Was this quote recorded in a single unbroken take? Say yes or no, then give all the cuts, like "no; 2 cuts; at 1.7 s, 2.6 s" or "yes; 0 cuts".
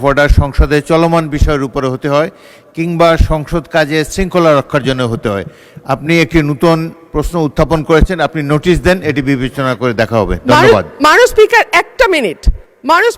yes; 0 cuts